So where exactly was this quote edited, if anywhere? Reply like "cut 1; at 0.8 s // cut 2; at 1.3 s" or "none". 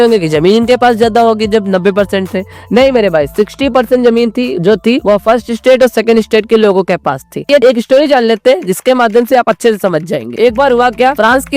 cut 1; at 7.5 s